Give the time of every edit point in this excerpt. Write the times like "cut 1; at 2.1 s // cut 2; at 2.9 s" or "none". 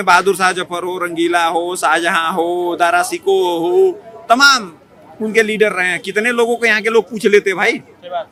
none